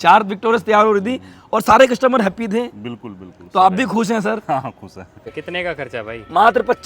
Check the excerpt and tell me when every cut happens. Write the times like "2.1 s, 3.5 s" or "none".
5.3 s